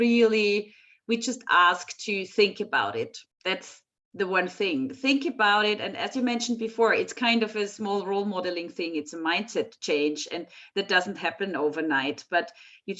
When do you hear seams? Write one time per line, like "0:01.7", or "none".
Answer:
0:03.2